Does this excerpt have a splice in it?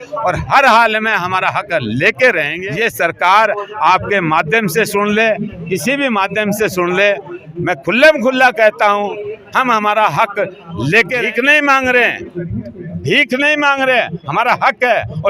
yes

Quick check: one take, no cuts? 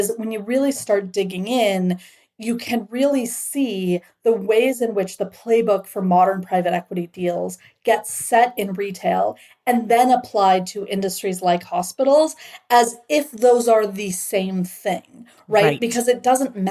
yes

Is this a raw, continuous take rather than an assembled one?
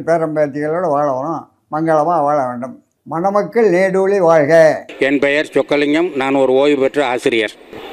yes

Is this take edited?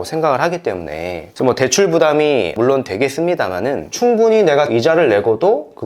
yes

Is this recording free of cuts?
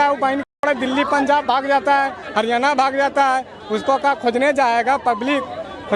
yes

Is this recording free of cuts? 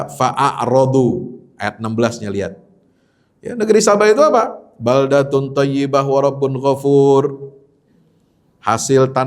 yes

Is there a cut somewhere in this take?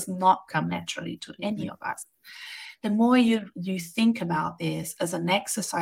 no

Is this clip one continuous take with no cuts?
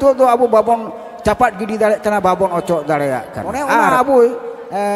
no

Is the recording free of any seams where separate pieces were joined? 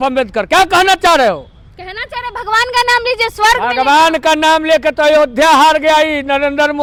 yes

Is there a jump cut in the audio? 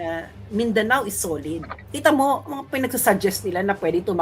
yes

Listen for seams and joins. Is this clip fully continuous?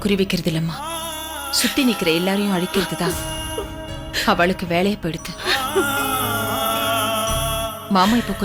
yes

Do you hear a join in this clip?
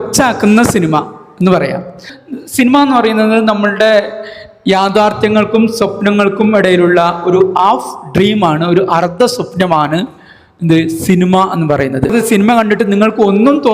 yes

